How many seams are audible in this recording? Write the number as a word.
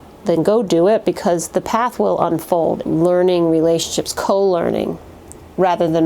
one